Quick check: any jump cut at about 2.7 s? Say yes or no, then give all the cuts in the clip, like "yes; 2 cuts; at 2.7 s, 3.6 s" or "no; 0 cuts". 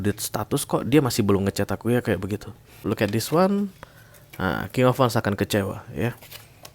yes; 1 cut; at 2.7 s